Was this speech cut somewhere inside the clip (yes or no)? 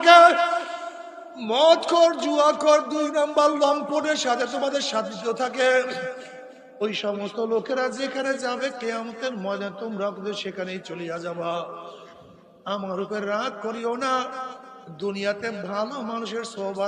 no